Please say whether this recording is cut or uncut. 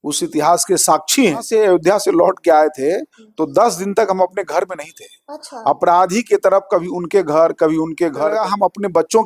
cut